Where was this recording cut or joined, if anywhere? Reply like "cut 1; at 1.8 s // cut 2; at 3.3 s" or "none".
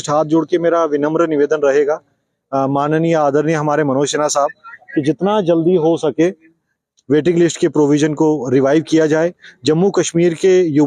none